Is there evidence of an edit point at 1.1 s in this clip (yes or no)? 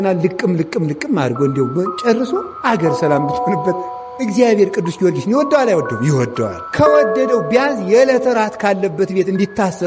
no